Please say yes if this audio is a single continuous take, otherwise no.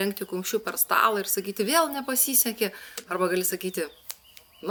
yes